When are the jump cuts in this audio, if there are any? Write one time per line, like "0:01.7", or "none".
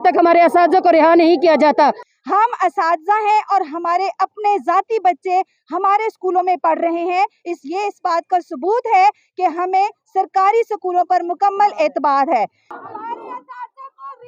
0:02.1
0:12.7